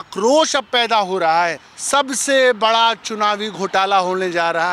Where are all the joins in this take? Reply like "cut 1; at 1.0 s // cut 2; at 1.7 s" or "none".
cut 1; at 1.7 s